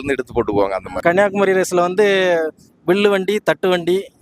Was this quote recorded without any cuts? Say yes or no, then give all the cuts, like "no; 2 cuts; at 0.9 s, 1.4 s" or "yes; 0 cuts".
no; 1 cut; at 0.9 s